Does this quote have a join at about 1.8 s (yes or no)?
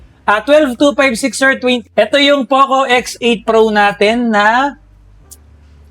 yes